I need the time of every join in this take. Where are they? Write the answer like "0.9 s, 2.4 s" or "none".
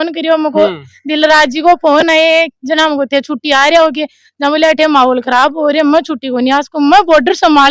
none